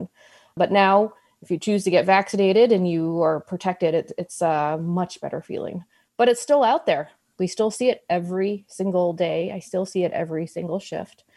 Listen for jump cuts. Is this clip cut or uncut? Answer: uncut